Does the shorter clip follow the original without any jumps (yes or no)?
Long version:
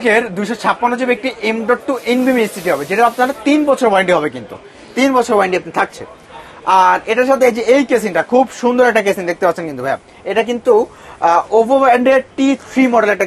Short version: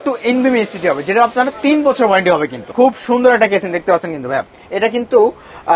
no